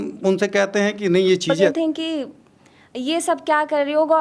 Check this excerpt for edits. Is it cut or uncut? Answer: cut